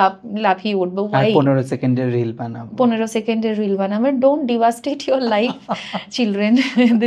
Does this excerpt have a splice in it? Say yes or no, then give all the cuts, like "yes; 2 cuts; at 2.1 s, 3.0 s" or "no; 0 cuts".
no; 0 cuts